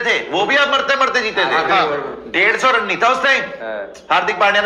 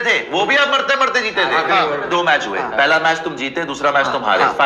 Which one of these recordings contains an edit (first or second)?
second